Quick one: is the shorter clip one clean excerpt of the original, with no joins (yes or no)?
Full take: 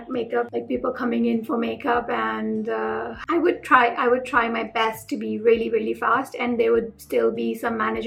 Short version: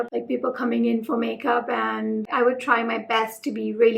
no